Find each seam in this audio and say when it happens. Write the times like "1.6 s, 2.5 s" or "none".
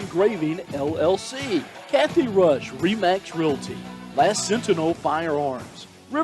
1.8 s